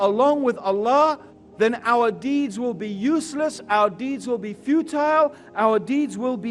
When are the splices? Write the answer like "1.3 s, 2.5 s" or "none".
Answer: none